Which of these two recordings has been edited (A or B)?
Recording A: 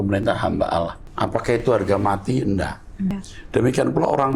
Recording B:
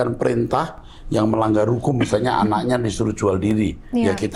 A